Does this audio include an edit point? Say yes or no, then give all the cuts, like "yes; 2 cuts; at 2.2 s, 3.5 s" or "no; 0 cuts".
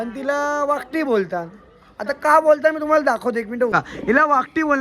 yes; 1 cut; at 3.7 s